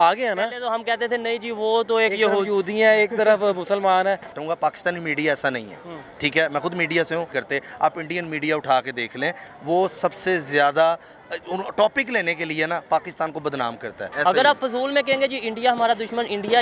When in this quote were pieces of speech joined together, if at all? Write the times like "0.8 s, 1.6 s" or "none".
4.3 s, 7.4 s, 14.1 s